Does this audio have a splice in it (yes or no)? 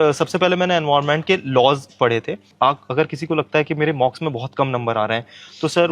yes